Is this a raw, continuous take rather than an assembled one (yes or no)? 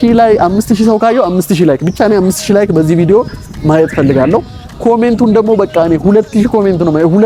yes